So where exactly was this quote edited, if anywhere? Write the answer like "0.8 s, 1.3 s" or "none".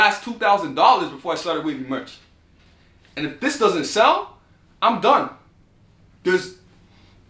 none